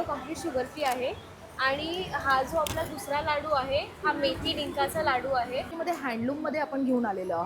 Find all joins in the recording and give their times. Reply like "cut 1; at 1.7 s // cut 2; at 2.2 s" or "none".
cut 1; at 5.7 s